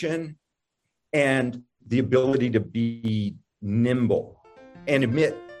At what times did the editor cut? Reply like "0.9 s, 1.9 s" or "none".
none